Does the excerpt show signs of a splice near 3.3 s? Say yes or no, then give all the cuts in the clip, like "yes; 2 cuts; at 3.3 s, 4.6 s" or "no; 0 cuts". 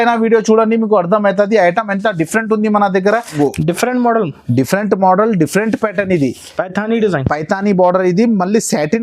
yes; 1 cut; at 3.3 s